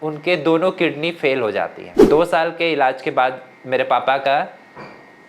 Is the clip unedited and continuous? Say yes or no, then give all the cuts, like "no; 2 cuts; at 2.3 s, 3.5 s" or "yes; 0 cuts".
no; 1 cut; at 2.1 s